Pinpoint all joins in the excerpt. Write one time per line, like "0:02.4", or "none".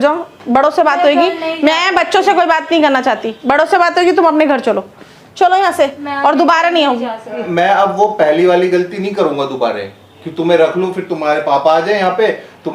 0:07.5